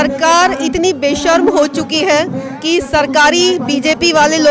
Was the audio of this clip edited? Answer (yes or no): no